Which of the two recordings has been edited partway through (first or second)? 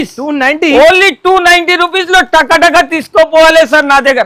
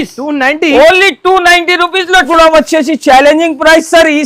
second